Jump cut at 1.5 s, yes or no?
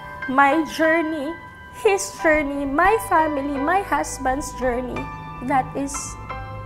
no